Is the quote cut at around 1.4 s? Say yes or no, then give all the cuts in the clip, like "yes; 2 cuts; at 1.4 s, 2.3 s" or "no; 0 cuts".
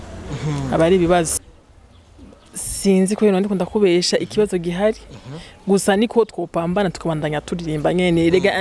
yes; 1 cut; at 1.4 s